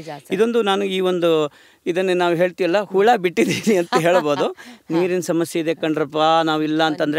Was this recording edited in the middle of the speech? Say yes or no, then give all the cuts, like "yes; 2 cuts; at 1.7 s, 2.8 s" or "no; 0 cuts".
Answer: no; 0 cuts